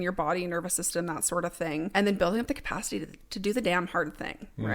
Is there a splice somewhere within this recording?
yes; 1 cut; at 1.9 s

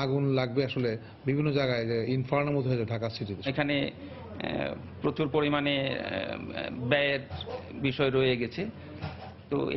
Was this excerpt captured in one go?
yes; 0 cuts

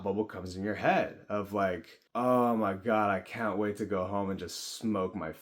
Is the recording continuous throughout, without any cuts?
no; 1 cut; at 1.9 s

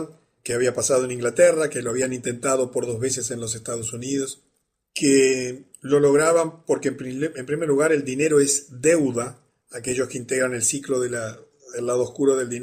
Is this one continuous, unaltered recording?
no; 1 cut; at 4.9 s

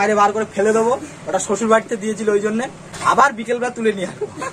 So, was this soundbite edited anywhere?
no; 0 cuts

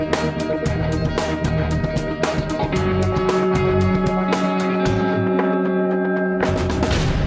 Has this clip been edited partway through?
yes; 1 cut; at 5.1 s

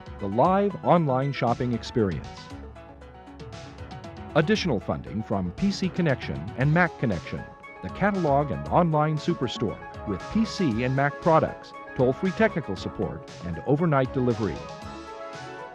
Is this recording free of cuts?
no; 2 cuts; at 2.2 s, 4.2 s

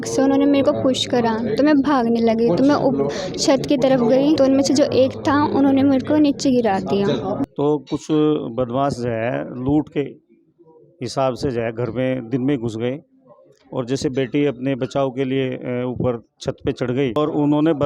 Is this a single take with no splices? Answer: no; 3 cuts; at 4.4 s, 7.2 s, 17.2 s

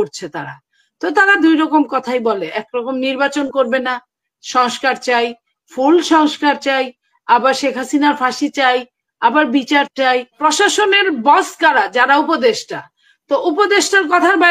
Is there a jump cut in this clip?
yes; 1 cut; at 10.3 s

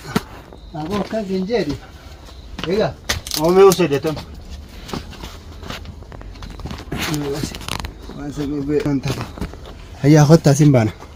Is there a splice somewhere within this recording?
no; 0 cuts

